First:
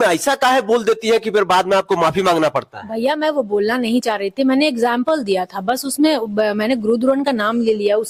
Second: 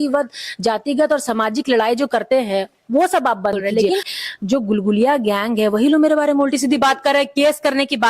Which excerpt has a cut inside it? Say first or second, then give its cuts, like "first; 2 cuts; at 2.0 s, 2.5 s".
second; 1 cut; at 3.7 s